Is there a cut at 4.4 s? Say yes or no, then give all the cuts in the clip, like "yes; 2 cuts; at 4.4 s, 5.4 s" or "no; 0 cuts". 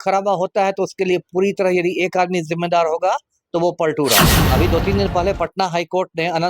yes; 1 cut; at 4.4 s